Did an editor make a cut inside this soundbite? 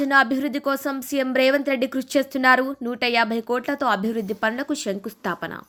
no; 0 cuts

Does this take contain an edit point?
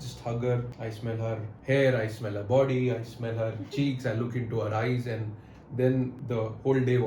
yes; 2 cuts; at 1.1 s, 6.2 s

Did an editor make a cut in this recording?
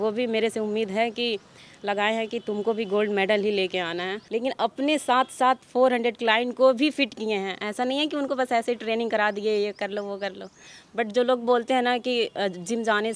yes; 1 cut; at 4.2 s

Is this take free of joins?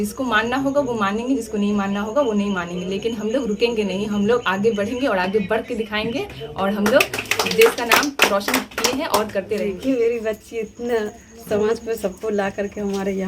no; 1 cut; at 9.8 s

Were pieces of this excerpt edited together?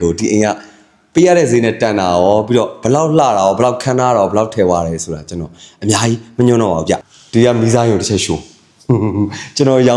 yes; 1 cut; at 7.1 s

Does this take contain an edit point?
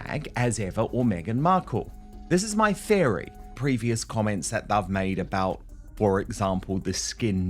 yes; 1 cut; at 3.5 s

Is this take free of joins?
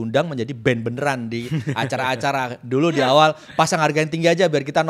yes; 0 cuts

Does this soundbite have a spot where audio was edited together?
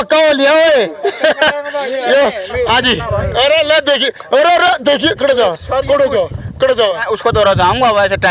yes; 1 cut; at 7.0 s

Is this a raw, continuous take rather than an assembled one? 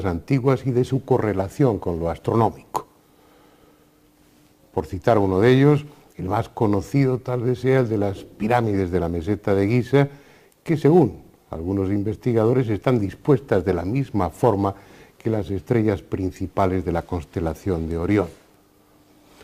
yes; 0 cuts

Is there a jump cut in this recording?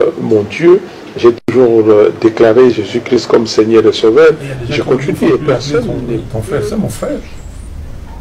yes; 1 cut; at 6.3 s

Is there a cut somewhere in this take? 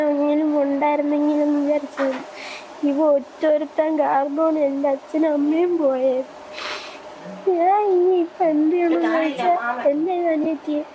no; 0 cuts

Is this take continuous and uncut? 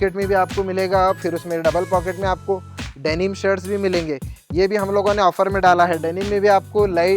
yes; 0 cuts

